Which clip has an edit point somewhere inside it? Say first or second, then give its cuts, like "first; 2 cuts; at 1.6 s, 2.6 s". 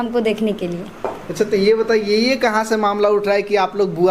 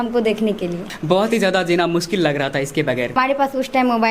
second; 2 cuts; at 0.9 s, 3.2 s